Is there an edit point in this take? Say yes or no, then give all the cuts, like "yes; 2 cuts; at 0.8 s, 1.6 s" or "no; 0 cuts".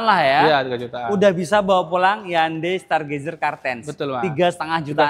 no; 0 cuts